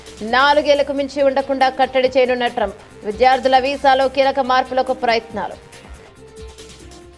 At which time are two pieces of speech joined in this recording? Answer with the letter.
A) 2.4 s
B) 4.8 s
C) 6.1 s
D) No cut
C